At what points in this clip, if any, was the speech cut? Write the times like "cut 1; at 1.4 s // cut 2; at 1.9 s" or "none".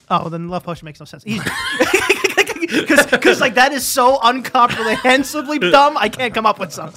none

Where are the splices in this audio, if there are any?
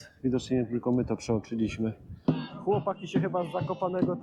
cut 1; at 2.1 s

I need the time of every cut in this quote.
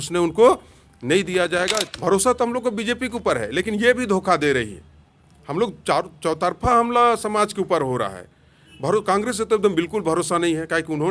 cut 1; at 1.9 s

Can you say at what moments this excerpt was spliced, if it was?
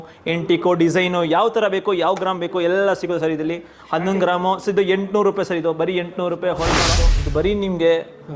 cut 1; at 6.9 s

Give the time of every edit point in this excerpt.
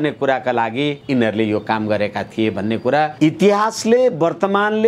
cut 1; at 1.0 s // cut 2; at 3.1 s

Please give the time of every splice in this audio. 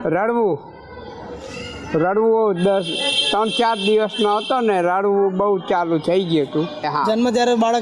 cut 1; at 6.9 s

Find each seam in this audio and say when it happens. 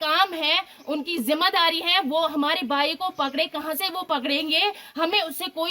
none

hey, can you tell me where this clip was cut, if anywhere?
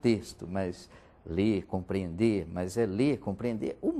none

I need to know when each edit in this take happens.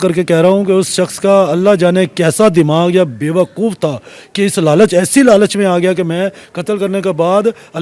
none

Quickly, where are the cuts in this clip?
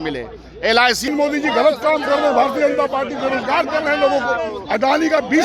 cut 1; at 1.1 s

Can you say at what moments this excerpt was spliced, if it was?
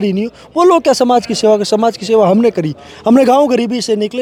none

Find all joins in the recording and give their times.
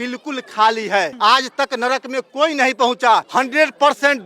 cut 1; at 1.1 s // cut 2; at 3.3 s

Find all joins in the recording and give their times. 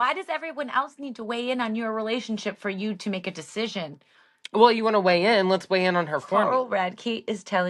cut 1; at 6.3 s

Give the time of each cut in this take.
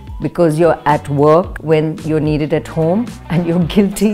cut 1; at 1.6 s // cut 2; at 3.2 s

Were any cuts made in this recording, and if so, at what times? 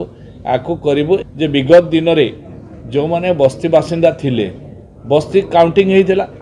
cut 1; at 1.2 s

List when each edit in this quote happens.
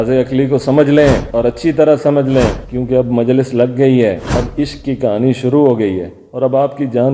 none

